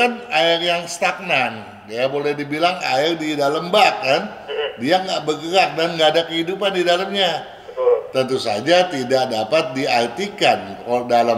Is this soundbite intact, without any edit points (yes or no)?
yes